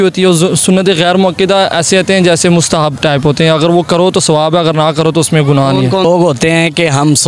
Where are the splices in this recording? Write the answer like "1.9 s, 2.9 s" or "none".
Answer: 6.0 s